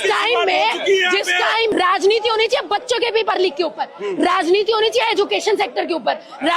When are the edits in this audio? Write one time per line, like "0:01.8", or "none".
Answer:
0:01.7